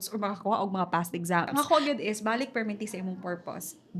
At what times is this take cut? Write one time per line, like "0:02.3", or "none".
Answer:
0:01.5